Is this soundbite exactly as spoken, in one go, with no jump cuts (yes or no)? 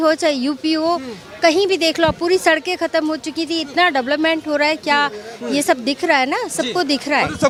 yes